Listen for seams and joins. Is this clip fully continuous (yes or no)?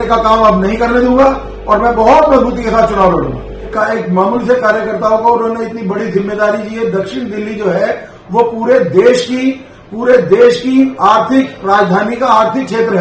no